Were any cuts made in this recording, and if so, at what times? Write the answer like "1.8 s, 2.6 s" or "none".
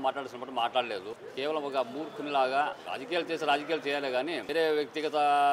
1.2 s, 2.8 s, 4.4 s